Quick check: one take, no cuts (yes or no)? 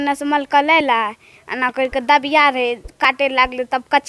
yes